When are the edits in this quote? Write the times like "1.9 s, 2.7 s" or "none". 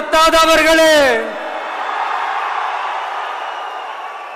none